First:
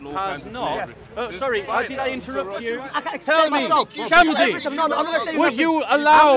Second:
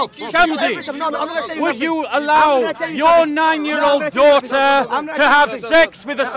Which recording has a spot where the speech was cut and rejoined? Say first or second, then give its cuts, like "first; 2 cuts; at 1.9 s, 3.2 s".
first; 1 cut; at 2.8 s